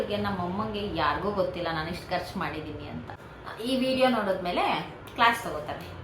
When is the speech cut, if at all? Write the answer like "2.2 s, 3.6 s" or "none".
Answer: 3.2 s